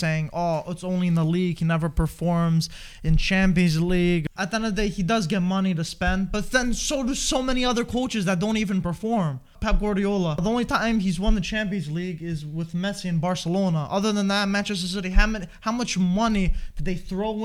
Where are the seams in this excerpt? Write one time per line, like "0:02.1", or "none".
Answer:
0:04.2
0:09.5
0:10.4